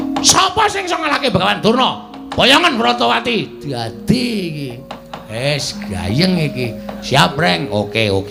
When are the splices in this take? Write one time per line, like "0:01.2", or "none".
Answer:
none